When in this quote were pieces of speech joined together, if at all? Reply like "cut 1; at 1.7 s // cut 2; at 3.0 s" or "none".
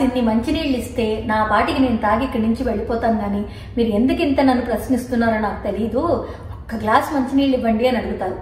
none